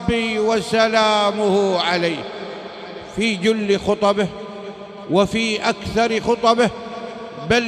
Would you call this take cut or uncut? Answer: uncut